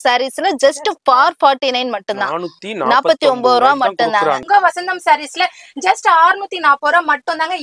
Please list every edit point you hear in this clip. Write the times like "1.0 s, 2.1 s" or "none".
4.4 s